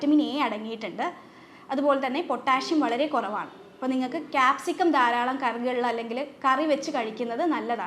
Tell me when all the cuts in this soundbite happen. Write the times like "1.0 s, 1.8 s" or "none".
none